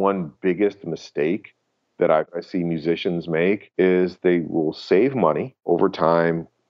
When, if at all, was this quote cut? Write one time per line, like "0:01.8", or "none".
0:02.3
0:03.7
0:05.5

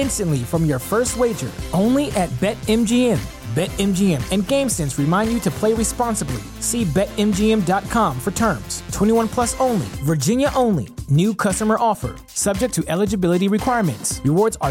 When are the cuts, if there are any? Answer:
none

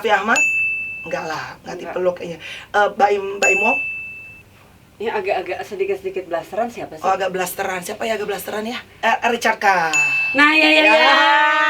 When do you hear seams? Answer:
0:08.9

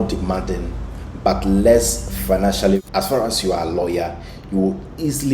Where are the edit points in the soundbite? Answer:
0:02.8

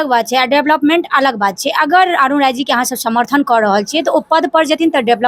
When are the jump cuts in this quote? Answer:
none

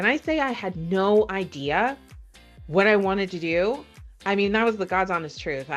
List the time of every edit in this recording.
none

